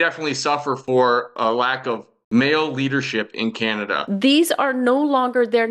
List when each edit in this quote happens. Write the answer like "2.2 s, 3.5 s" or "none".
2.1 s, 4.0 s